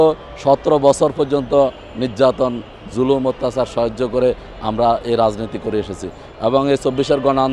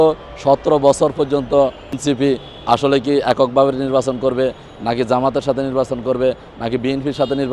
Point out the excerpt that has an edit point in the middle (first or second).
second